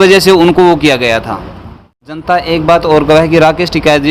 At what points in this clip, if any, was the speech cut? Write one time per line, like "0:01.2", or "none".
0:02.2